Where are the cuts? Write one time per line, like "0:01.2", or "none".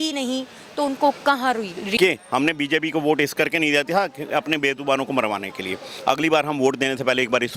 0:02.0